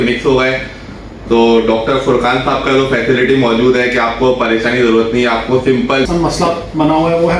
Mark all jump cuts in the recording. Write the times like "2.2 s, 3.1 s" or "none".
6.1 s